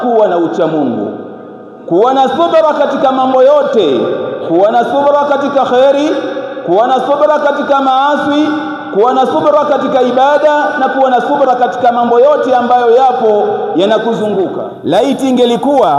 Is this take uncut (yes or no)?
no